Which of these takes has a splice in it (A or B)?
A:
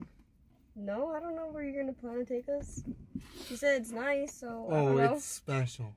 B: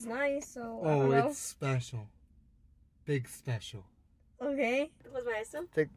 B